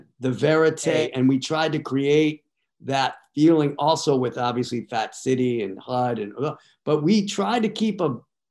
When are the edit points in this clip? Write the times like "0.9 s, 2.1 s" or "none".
1.0 s